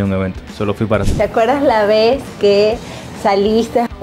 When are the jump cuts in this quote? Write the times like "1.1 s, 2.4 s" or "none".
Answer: 1.1 s